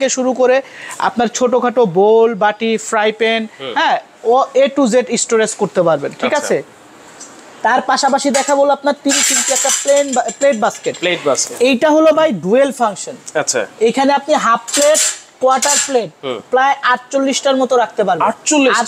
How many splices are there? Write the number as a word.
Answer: zero